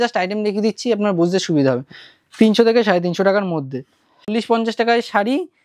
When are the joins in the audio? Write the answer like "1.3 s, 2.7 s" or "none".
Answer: 4.3 s